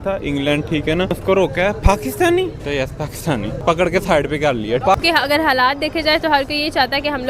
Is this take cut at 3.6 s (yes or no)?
yes